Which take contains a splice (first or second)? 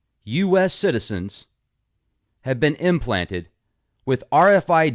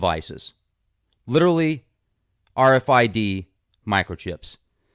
second